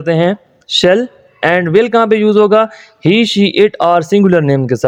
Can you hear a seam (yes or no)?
no